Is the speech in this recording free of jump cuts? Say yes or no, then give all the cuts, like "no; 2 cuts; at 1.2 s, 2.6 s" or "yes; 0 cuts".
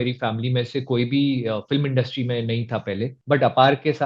no; 1 cut; at 3.1 s